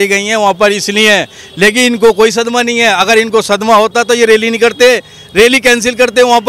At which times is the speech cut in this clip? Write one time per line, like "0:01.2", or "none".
none